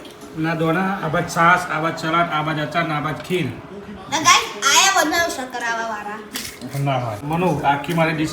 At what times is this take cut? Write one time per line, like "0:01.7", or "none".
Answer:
0:07.2